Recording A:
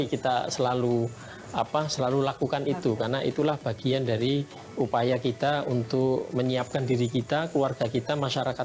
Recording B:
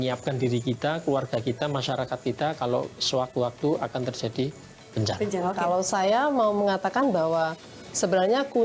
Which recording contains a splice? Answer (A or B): B